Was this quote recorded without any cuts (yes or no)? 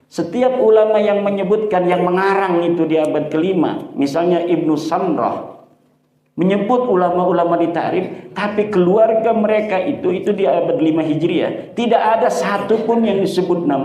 yes